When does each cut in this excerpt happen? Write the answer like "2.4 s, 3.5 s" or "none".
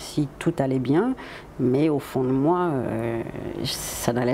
none